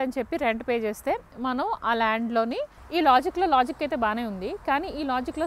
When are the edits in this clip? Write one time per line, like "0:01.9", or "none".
0:02.8

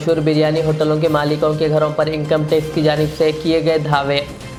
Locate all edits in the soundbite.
none

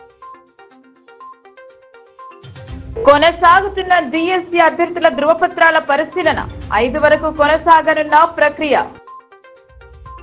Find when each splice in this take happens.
0:01.5
0:02.9

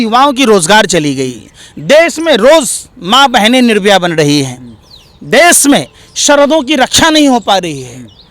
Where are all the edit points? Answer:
none

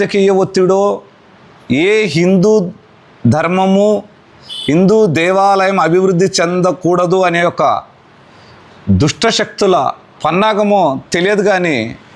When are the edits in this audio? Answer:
none

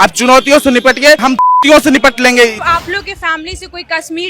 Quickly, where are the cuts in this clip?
0:02.6

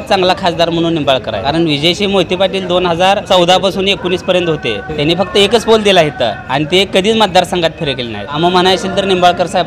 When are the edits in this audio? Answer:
0:01.4
0:03.2
0:04.9
0:06.4
0:08.4

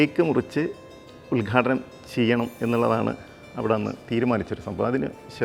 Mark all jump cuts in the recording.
none

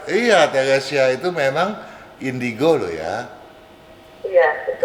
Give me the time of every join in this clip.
none

